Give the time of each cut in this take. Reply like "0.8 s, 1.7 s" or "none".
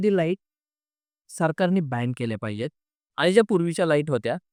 none